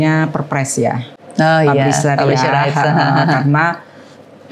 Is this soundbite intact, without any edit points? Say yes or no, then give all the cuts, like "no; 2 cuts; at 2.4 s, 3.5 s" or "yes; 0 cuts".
yes; 0 cuts